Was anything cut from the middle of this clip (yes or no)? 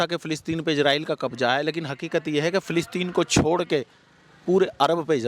no